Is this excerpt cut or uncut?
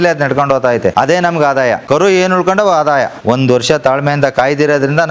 cut